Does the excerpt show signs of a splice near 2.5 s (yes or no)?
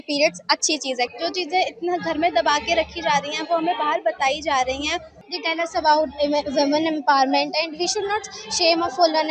no